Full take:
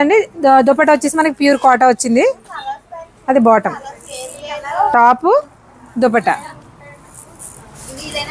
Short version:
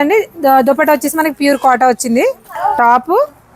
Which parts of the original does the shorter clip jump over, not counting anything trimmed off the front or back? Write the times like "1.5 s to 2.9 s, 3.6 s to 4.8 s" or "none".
2.5 s to 4.6 s